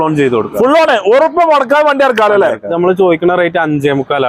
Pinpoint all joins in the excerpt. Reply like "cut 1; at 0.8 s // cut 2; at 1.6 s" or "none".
cut 1; at 2.7 s